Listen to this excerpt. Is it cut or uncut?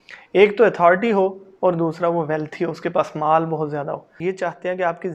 cut